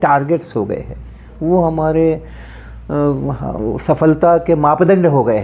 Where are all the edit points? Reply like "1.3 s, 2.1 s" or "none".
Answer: none

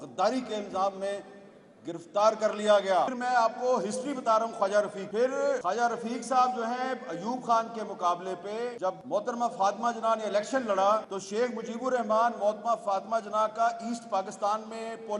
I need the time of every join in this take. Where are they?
3.1 s, 5.4 s, 8.9 s, 11.2 s

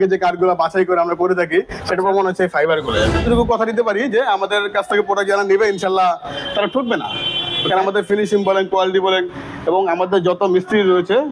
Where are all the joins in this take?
3.2 s

